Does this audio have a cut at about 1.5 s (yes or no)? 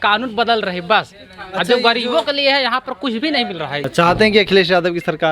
no